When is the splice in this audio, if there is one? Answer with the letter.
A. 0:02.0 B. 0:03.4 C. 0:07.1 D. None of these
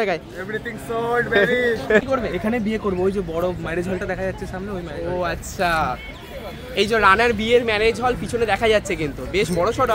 A